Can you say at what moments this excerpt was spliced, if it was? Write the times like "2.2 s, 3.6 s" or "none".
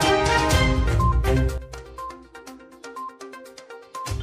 1.1 s, 3.3 s